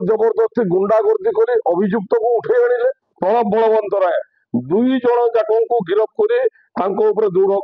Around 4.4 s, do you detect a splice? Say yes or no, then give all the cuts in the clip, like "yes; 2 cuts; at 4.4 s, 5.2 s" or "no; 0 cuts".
no; 1 cut; at 3.1 s